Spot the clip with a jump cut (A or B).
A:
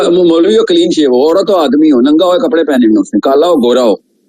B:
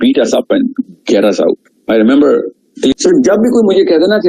B